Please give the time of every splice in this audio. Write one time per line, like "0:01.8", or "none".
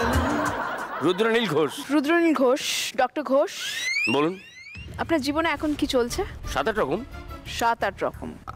0:00.9
0:01.8